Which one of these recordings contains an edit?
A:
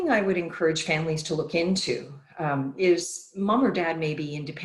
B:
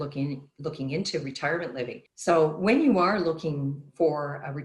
B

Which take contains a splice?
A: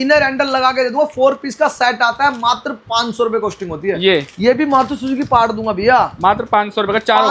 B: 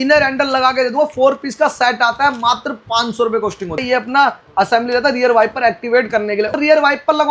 B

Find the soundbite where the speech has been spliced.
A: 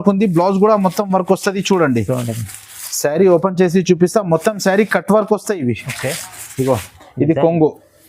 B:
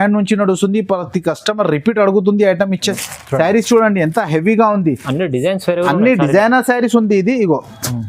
B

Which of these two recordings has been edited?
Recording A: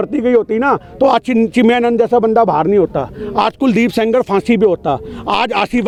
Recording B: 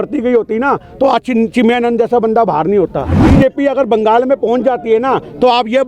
B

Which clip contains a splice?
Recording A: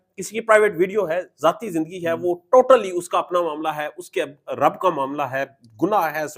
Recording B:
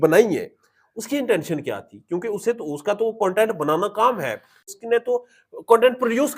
B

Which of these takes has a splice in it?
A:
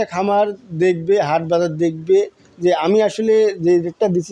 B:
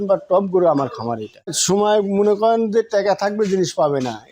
B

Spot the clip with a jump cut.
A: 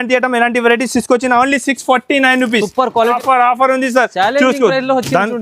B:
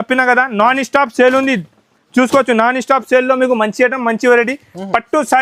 A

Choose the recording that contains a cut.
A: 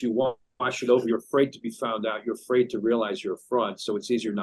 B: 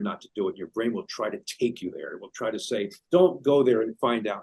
B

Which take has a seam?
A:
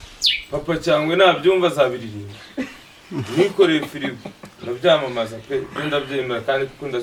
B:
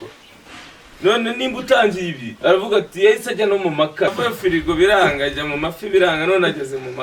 B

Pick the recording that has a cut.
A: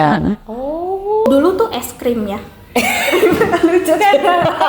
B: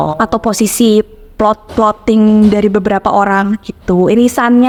A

